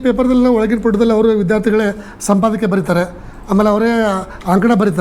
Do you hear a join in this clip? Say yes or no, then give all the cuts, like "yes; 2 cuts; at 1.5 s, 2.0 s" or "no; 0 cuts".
no; 0 cuts